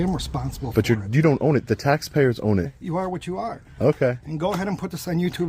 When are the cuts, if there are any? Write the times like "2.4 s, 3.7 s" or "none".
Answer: 2.7 s